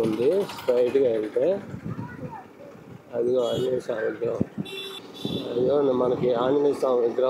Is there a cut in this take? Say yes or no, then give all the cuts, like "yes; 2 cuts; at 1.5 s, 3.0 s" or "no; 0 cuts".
yes; 1 cut; at 4.9 s